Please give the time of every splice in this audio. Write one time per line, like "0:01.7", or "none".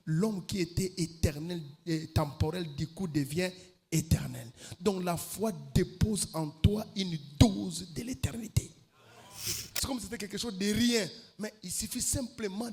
0:09.3